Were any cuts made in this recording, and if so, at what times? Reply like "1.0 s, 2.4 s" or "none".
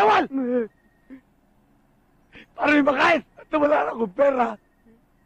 3.4 s